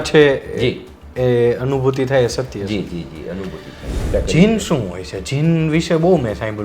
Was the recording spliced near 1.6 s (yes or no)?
no